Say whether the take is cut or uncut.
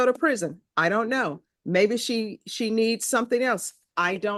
uncut